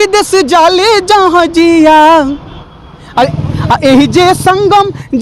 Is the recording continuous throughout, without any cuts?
no; 1 cut; at 3.3 s

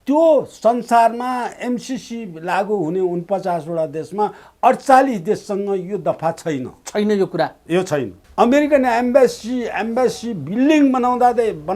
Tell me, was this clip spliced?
yes; 1 cut; at 8.2 s

